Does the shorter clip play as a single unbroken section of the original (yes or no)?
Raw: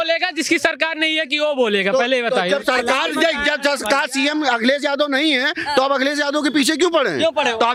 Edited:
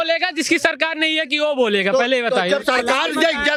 yes